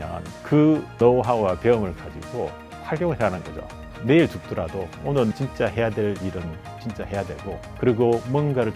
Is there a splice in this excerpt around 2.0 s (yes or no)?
no